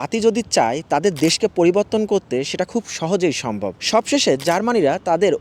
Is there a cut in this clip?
yes; 1 cut; at 3.7 s

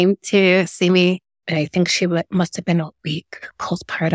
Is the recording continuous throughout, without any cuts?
no; 1 cut; at 1.3 s

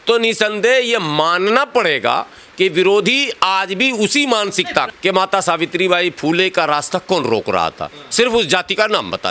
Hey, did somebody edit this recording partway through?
yes; 1 cut; at 4.9 s

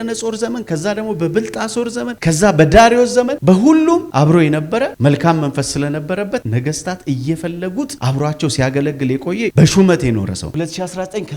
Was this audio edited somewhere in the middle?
yes; 1 cut; at 10.4 s

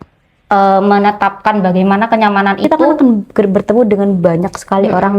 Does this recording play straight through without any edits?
no; 1 cut; at 2.8 s

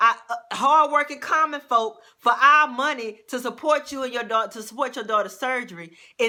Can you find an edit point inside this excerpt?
no; 0 cuts

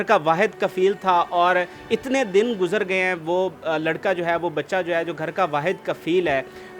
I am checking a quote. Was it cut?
no; 0 cuts

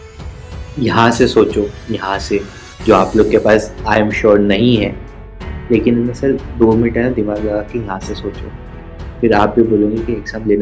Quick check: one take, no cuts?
yes; 0 cuts

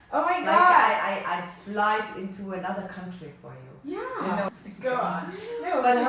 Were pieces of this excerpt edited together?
yes; 1 cut; at 4.5 s

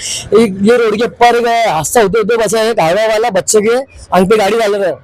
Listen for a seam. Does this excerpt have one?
no; 0 cuts

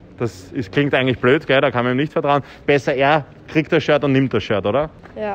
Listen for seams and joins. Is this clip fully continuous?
yes; 0 cuts

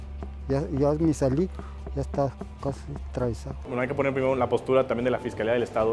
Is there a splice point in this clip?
yes; 1 cut; at 3.6 s

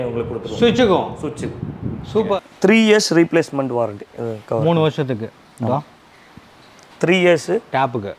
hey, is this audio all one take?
no; 1 cut; at 2.4 s

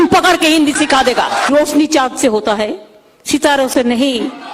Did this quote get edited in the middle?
yes; 1 cut; at 1.5 s

